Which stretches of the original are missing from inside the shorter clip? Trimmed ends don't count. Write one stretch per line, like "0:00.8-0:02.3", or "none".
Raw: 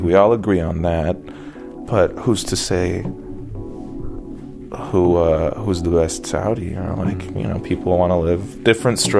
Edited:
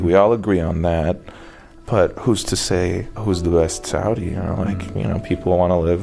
0:03.2-0:05.6